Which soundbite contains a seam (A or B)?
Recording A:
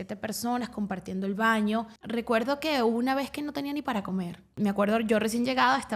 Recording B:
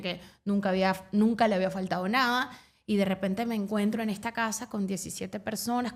A